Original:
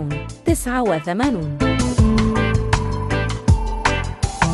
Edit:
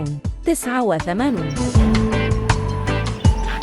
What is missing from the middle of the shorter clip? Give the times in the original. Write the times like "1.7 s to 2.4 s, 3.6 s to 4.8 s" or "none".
1.5 s to 1.8 s